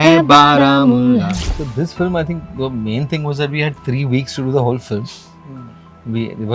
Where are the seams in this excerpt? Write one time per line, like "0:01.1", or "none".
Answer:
0:01.4

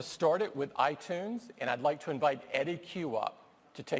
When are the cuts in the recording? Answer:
none

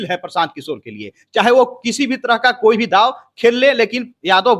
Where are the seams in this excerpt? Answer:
none

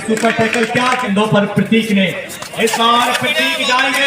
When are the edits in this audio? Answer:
0:01.0

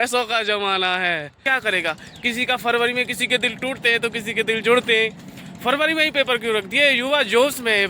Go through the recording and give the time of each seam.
0:01.4

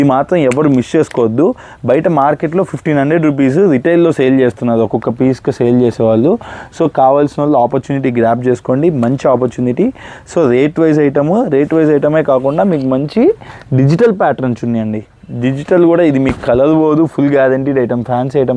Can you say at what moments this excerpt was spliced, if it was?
none

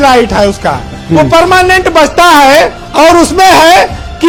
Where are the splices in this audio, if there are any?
none

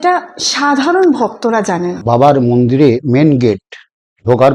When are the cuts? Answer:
none

